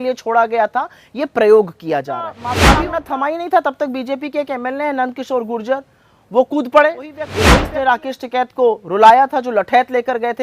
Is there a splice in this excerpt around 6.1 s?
no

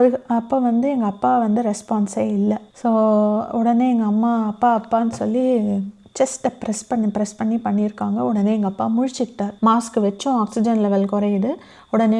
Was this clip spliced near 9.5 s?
yes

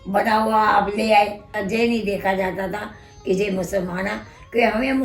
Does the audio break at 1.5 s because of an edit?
yes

